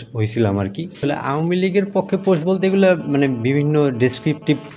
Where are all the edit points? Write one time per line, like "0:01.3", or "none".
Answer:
0:00.9